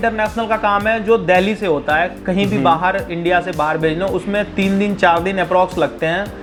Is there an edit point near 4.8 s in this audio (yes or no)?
no